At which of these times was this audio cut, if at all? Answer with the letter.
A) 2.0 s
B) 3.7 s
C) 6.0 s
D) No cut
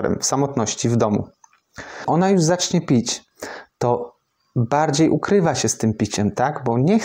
A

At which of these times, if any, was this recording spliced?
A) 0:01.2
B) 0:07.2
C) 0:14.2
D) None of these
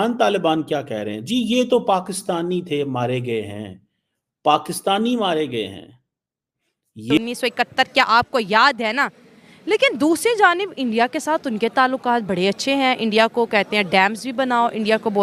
B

